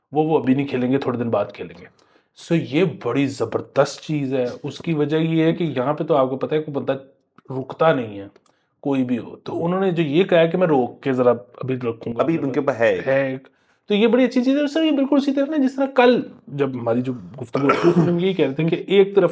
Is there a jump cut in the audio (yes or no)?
no